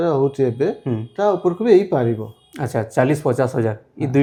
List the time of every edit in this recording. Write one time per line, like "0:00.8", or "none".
none